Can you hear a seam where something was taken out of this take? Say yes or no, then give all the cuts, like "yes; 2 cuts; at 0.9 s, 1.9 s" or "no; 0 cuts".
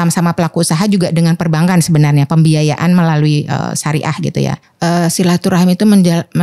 yes; 1 cut; at 4.6 s